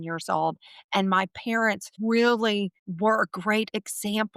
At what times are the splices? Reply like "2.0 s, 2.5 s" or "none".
1.9 s, 2.8 s